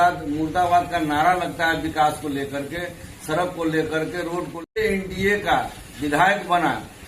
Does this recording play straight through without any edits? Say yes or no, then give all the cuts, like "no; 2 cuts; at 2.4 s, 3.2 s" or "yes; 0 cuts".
no; 1 cut; at 4.8 s